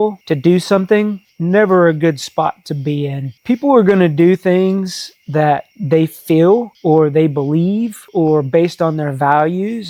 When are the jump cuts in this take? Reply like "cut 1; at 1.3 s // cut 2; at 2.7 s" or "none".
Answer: none